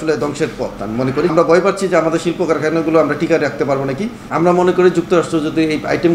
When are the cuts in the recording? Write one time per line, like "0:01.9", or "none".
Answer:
0:01.3
0:04.2